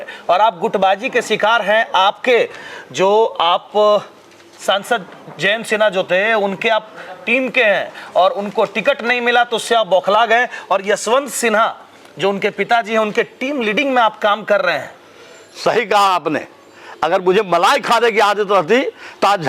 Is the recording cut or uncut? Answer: uncut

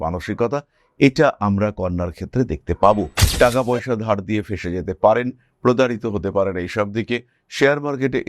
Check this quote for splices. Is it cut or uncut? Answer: cut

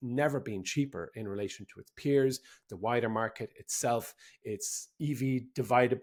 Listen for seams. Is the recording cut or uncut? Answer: uncut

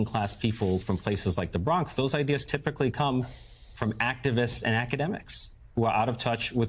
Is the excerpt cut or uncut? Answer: uncut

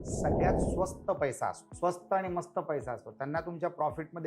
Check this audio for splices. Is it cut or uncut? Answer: cut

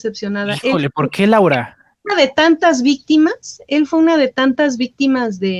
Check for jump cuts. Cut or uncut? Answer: uncut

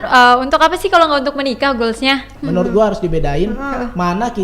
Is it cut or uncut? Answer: cut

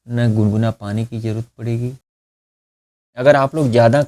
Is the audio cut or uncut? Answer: cut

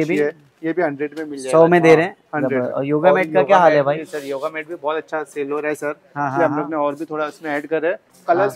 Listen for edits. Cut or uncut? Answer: uncut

